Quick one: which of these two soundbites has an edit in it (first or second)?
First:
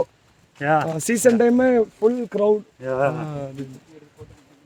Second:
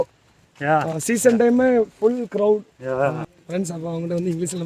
second